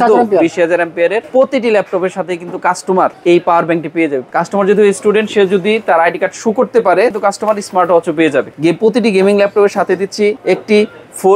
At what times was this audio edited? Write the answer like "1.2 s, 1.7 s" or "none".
1.2 s, 3.2 s, 4.2 s, 7.1 s, 8.5 s, 10.4 s